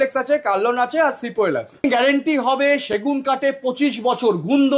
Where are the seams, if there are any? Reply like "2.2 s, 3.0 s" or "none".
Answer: 1.8 s